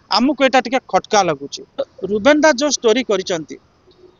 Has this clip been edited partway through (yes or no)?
yes